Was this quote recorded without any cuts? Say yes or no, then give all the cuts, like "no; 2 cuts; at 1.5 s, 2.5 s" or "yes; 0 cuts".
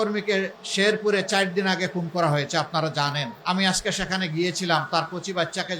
no; 1 cut; at 3.3 s